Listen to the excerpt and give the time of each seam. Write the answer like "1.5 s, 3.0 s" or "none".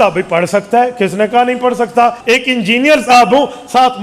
2.2 s